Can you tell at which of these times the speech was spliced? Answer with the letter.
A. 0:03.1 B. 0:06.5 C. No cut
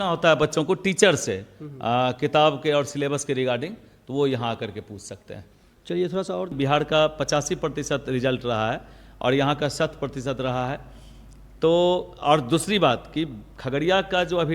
B